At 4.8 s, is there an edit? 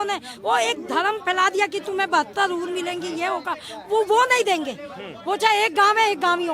no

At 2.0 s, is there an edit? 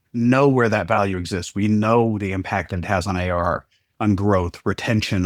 no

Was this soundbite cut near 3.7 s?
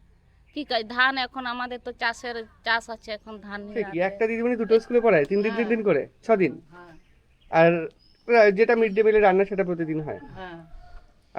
yes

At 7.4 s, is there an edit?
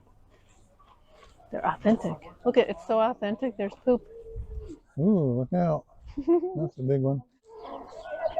yes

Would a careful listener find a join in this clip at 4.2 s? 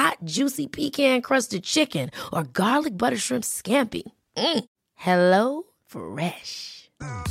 no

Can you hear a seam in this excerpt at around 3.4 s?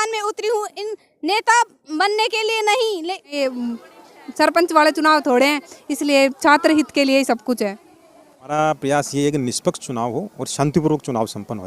yes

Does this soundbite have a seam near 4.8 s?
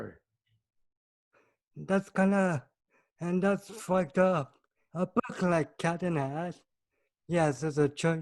yes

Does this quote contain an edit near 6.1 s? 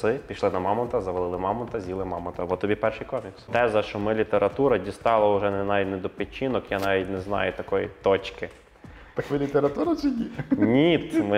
no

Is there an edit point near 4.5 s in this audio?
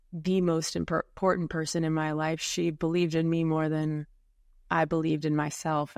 no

